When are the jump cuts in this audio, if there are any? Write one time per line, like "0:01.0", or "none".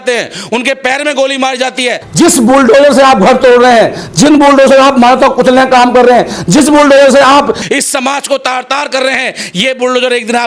0:02.0